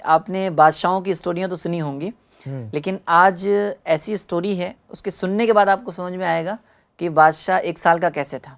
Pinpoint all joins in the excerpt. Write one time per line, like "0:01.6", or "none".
none

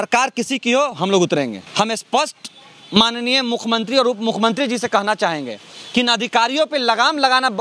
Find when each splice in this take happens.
0:01.6

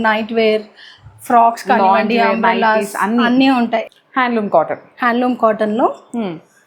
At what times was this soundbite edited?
0:03.9

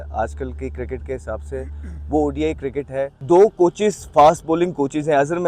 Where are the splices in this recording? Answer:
0:03.1

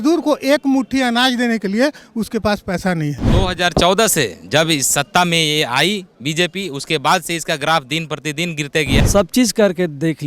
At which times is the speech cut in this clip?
0:03.2
0:08.9

